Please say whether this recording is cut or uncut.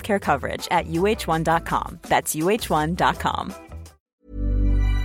cut